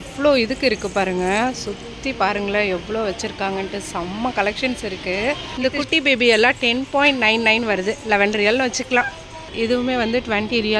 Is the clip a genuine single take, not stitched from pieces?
no; 2 cuts; at 5.5 s, 9.5 s

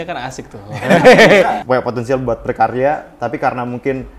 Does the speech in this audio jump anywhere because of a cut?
yes; 1 cut; at 1.6 s

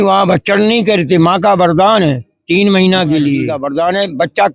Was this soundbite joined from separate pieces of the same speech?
yes; 1 cut; at 3.6 s

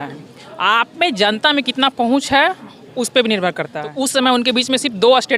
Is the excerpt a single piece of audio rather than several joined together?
no; 1 cut; at 3.8 s

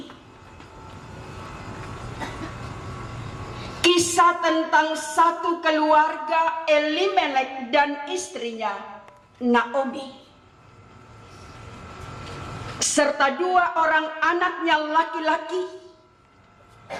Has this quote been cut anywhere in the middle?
no; 0 cuts

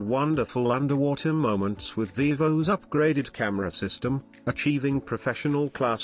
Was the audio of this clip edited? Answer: no; 0 cuts

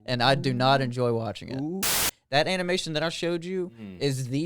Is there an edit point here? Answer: yes; 1 cut; at 1.9 s

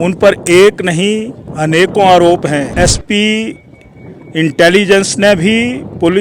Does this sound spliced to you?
yes; 1 cut; at 2.7 s

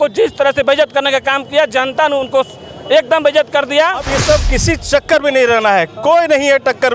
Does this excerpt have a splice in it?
yes; 1 cut; at 4.1 s

